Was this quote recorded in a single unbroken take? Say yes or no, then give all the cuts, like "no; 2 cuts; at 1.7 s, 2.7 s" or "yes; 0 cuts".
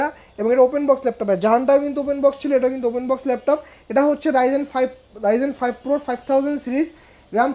yes; 0 cuts